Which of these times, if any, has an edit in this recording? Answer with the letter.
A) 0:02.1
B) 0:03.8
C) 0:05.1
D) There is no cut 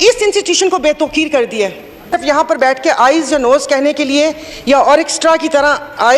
A